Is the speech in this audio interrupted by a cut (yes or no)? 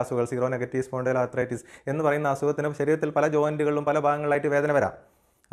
no